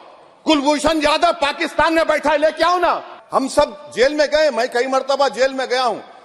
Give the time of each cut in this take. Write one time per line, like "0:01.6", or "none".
0:03.1